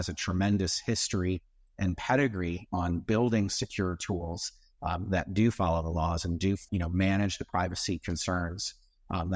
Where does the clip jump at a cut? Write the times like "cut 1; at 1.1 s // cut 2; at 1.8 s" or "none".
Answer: none

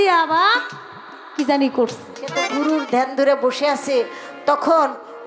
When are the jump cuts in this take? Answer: cut 1; at 2.4 s

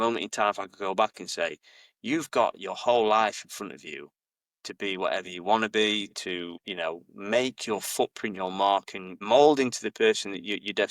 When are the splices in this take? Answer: none

